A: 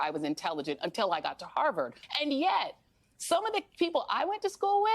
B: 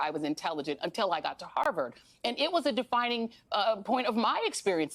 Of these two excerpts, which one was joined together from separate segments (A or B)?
A